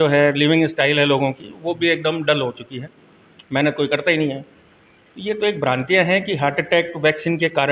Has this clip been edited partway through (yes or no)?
no